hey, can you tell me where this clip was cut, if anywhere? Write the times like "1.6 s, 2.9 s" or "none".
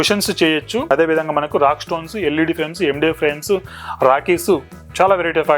0.9 s